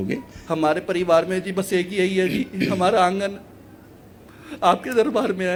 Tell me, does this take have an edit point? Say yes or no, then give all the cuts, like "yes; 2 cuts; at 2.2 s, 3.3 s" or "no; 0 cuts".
no; 0 cuts